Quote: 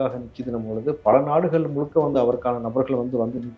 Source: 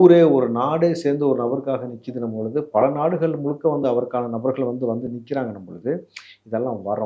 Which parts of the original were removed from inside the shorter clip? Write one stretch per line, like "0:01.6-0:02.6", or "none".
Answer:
none